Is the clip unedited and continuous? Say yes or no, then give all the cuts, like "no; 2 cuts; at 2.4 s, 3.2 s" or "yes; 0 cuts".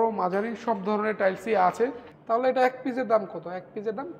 no; 1 cut; at 2.1 s